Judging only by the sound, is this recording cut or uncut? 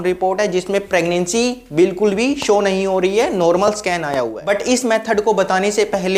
uncut